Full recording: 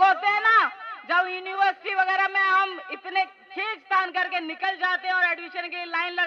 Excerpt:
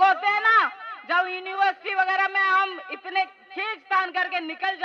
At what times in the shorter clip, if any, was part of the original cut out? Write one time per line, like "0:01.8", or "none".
none